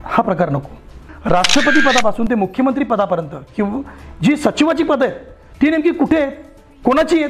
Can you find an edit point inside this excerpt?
yes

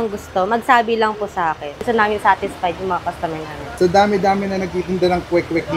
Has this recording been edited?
yes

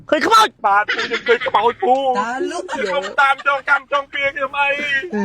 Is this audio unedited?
no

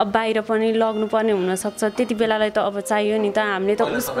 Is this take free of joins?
yes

